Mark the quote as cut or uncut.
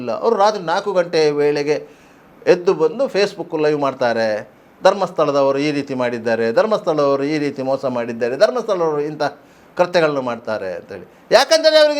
uncut